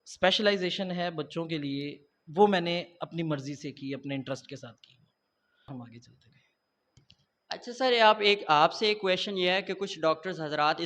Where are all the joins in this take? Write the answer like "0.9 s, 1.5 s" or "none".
5.8 s